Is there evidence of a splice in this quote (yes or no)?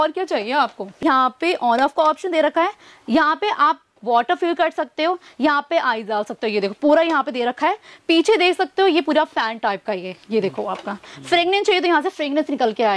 yes